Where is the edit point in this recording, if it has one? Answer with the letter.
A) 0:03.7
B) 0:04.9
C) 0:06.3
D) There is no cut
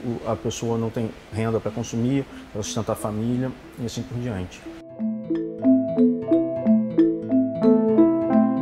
B